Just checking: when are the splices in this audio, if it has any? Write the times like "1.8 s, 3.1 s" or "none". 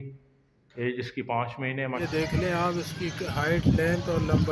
2.0 s